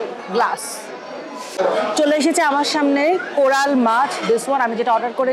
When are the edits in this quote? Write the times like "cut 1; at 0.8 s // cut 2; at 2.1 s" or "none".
cut 1; at 1.5 s